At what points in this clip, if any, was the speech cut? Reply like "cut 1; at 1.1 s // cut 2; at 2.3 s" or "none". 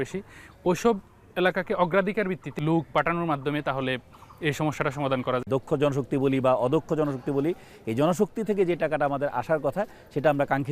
cut 1; at 2.4 s // cut 2; at 5.4 s